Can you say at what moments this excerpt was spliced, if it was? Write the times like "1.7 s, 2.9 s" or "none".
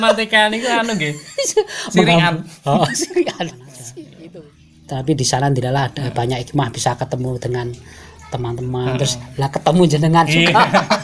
4.2 s

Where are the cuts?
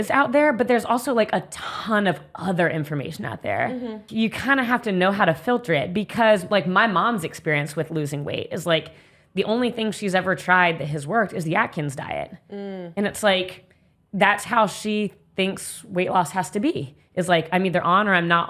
4.0 s

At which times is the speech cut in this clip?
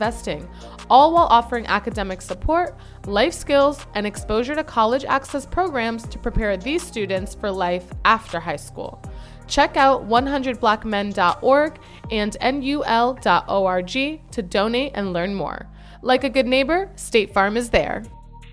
none

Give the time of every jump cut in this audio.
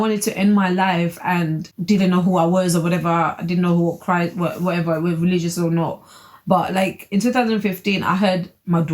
1.7 s

